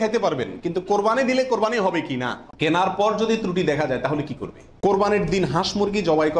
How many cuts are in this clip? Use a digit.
2